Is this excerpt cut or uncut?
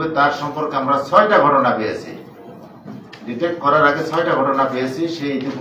uncut